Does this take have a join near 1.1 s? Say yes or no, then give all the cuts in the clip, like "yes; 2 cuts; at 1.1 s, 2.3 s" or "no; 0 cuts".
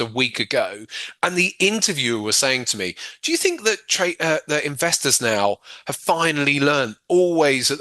no; 0 cuts